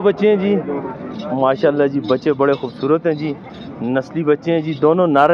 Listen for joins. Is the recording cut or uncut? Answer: uncut